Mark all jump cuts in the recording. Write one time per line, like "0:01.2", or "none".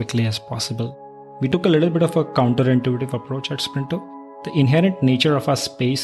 0:01.4
0:04.4